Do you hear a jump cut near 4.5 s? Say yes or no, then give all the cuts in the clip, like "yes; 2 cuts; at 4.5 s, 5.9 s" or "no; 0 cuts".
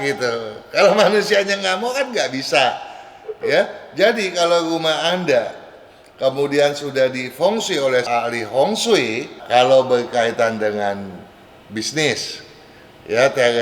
no; 2 cuts; at 8.1 s, 9.3 s